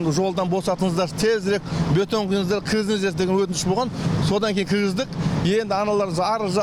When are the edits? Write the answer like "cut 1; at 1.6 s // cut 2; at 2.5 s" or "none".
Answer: none